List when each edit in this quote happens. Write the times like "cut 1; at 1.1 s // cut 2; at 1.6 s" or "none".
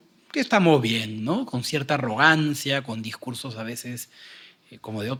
none